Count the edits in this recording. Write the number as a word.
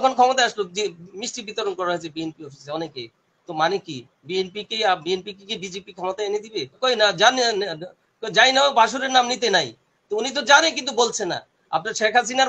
one